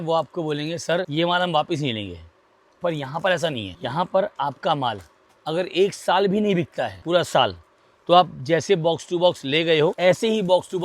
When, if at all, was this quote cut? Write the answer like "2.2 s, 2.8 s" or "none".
1.1 s, 3.7 s, 7.0 s, 10.0 s